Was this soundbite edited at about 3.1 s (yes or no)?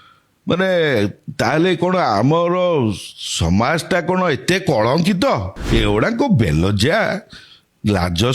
no